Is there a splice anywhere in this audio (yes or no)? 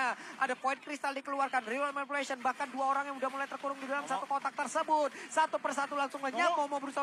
no